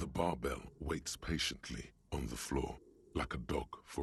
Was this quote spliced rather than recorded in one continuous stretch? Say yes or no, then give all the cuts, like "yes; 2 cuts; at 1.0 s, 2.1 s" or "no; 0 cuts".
no; 0 cuts